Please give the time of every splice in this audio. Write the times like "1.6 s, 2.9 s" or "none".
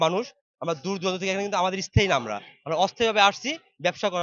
none